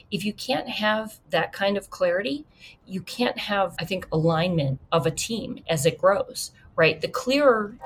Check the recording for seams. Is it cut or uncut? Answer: cut